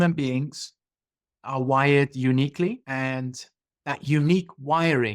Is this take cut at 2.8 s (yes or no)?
yes